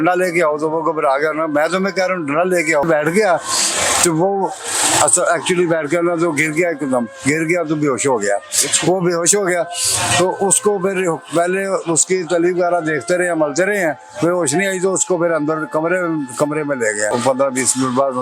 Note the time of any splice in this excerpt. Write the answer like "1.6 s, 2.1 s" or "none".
2.8 s, 17.1 s